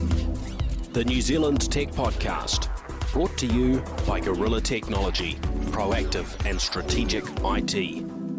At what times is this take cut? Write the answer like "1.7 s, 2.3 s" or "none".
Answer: none